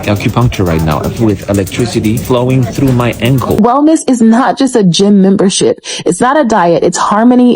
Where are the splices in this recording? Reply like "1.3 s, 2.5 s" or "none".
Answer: 3.6 s